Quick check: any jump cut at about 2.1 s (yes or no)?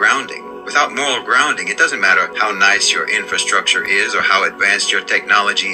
yes